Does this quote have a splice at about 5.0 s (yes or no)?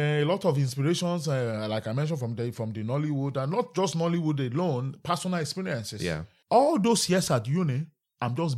no